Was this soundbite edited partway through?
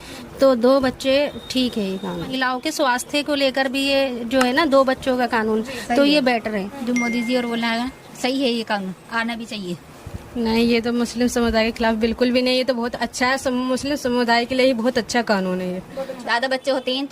yes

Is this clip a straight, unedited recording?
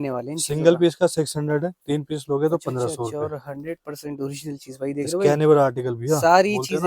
yes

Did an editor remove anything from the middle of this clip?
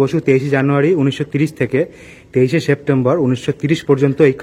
no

